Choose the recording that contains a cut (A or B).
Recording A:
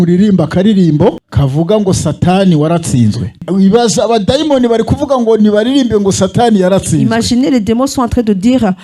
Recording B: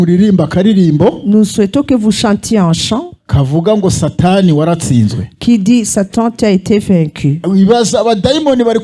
A